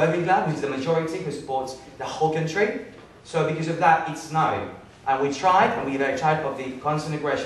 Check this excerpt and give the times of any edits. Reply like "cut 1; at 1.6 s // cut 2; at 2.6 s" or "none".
none